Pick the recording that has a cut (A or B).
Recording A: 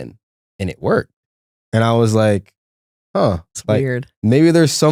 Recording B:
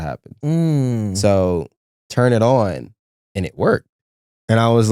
B